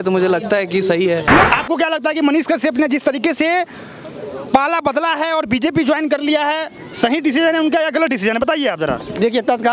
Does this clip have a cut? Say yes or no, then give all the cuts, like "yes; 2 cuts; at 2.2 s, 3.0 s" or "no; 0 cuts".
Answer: yes; 1 cut; at 1.5 s